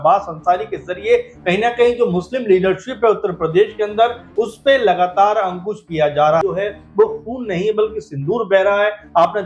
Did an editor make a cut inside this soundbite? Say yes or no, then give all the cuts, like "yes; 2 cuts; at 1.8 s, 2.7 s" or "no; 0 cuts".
yes; 1 cut; at 6.4 s